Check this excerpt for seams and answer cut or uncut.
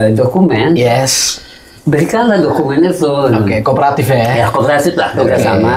uncut